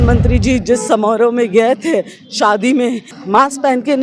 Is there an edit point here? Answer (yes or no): yes